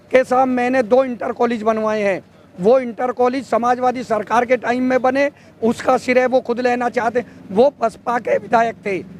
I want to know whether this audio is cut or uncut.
uncut